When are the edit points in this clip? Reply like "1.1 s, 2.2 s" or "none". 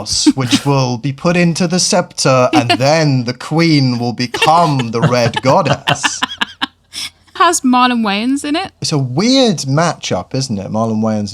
7.4 s, 8.8 s